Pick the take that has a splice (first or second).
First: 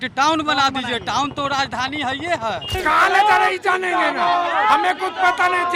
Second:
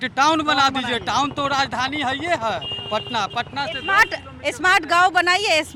first